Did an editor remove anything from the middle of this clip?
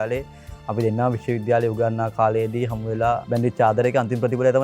yes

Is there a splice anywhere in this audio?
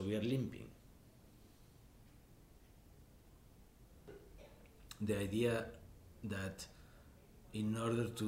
yes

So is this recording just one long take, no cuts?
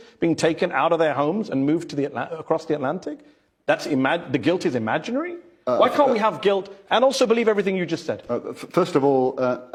yes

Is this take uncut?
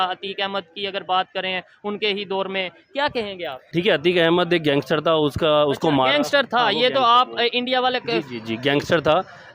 no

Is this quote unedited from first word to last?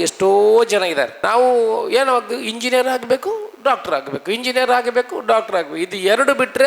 no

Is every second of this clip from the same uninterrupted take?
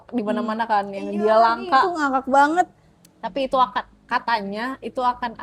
yes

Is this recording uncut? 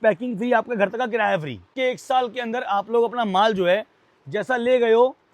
no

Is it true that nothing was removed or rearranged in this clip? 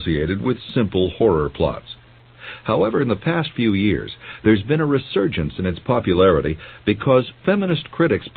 yes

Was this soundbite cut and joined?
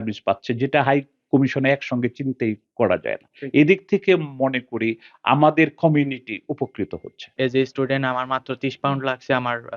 yes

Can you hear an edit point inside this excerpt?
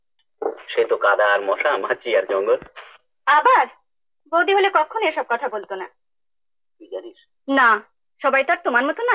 no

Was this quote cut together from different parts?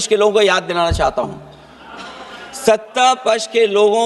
no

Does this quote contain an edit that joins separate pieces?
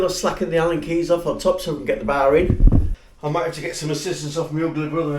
yes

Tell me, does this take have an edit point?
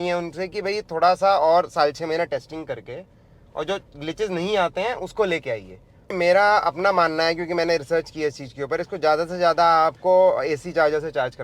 yes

